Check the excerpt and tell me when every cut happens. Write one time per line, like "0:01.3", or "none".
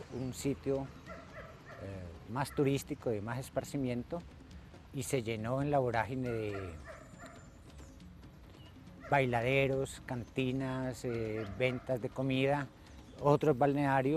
none